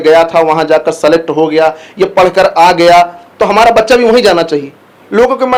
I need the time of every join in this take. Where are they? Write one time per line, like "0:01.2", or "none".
none